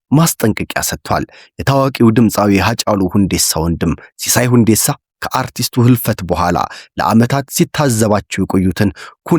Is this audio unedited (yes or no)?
yes